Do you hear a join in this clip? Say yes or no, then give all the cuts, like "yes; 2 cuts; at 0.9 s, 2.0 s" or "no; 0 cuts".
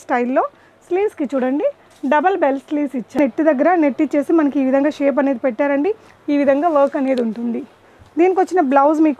yes; 2 cuts; at 3.2 s, 6.1 s